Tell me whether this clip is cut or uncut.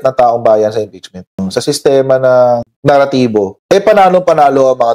cut